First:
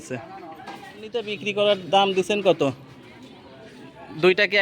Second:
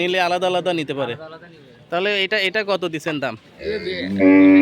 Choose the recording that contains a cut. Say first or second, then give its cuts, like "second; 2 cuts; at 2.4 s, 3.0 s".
first; 1 cut; at 1.3 s